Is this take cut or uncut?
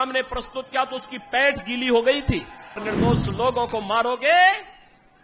cut